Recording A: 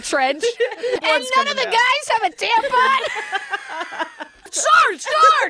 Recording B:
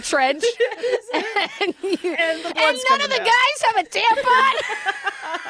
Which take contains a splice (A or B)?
A